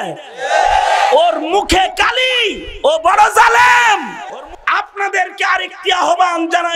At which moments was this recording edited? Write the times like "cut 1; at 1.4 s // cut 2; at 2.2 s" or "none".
cut 1; at 4.3 s